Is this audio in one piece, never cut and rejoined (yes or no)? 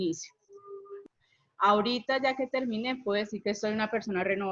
no